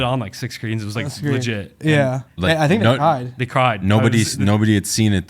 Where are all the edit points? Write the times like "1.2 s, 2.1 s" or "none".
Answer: 2.4 s